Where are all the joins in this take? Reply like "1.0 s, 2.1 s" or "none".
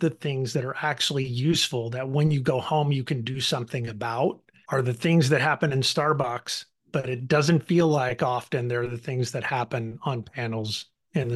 none